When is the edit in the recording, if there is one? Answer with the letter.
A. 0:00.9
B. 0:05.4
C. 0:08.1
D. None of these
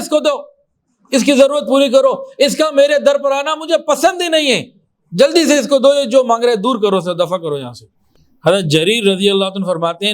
C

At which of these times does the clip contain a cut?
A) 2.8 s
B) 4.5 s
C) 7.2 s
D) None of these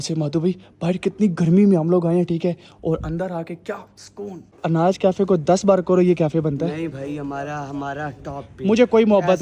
B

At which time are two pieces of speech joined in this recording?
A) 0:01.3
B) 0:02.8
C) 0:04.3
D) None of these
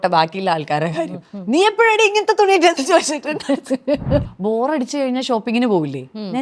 C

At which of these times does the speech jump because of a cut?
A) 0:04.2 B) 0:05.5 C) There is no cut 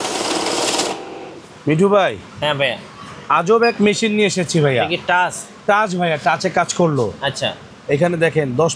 C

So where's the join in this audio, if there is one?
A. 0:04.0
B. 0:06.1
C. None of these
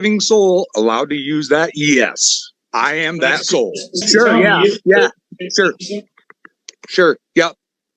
A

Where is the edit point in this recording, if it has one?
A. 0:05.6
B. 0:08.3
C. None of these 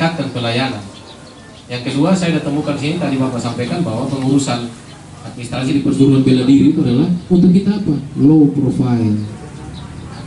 A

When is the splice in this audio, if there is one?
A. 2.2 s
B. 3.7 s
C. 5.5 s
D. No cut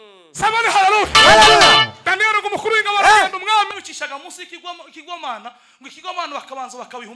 B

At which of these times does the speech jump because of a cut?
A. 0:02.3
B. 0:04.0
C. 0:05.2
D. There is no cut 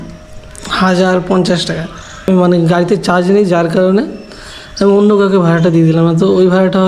A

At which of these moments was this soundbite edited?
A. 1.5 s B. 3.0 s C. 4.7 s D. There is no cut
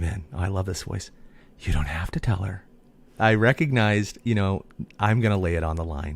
B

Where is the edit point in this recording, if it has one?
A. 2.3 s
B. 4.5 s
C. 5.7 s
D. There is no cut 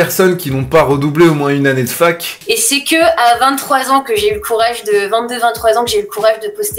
A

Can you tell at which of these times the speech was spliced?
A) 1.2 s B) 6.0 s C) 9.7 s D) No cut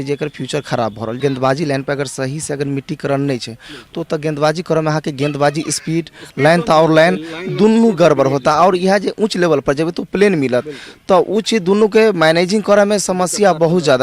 A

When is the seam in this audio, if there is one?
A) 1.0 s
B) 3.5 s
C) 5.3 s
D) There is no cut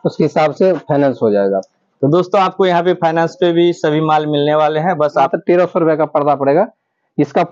C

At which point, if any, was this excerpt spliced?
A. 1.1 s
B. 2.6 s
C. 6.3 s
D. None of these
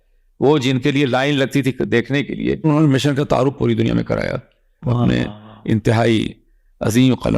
B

